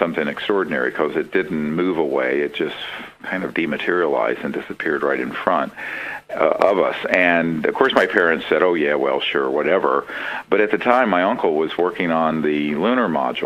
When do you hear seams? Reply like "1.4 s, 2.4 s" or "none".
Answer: 9.3 s